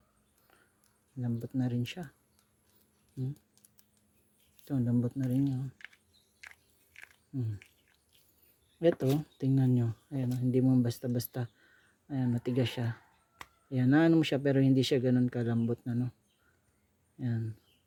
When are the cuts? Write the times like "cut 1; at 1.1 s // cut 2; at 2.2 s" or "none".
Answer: none

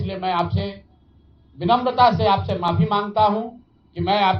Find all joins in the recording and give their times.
none

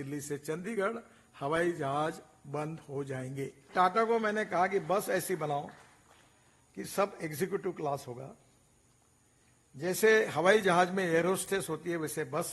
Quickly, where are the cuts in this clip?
cut 1; at 3.7 s

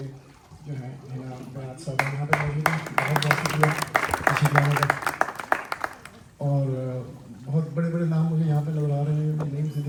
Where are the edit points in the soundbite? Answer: none

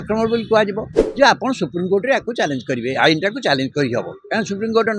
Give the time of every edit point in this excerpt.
cut 1; at 1.0 s

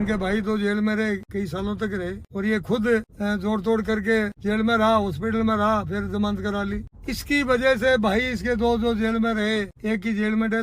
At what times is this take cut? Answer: cut 1; at 1.3 s // cut 2; at 2.2 s // cut 3; at 3.1 s // cut 4; at 4.4 s // cut 5; at 6.9 s // cut 6; at 9.7 s

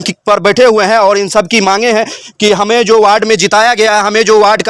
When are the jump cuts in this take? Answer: none

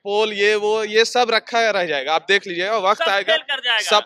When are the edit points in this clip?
none

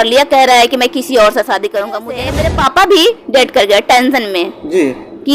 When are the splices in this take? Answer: cut 1; at 2.2 s

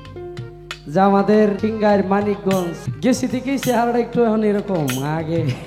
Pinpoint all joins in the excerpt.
cut 1; at 1.6 s // cut 2; at 2.8 s

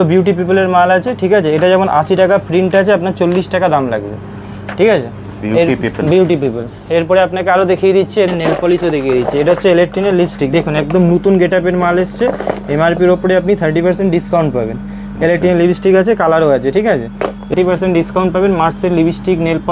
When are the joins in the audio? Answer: cut 1; at 8.3 s // cut 2; at 17.5 s

